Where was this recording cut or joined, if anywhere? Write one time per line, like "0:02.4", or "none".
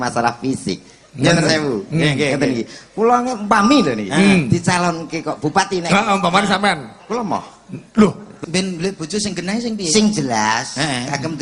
0:08.4